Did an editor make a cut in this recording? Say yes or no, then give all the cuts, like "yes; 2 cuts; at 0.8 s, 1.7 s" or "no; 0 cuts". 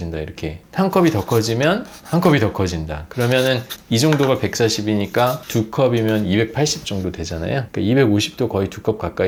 no; 0 cuts